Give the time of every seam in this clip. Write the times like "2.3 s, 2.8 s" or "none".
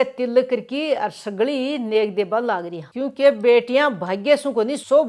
none